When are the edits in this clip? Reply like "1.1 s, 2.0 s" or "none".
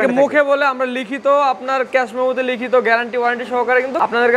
none